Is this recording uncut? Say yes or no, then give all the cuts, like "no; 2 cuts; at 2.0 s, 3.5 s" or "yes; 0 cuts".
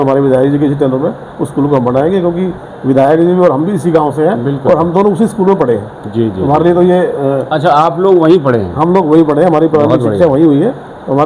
yes; 0 cuts